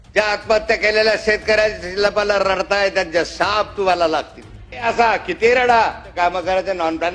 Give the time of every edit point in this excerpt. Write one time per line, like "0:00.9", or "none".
0:04.8
0:06.1